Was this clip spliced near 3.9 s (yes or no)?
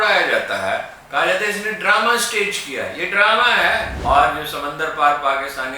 yes